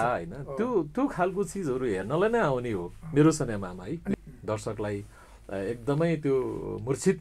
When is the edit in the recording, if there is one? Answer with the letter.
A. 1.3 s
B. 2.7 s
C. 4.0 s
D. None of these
C